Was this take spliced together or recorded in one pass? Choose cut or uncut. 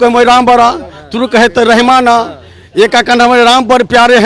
uncut